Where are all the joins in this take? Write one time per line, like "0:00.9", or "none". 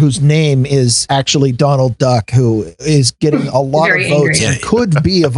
0:01.0